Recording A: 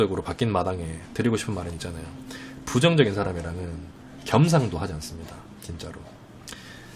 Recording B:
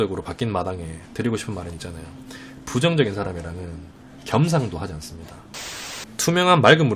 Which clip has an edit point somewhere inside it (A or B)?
B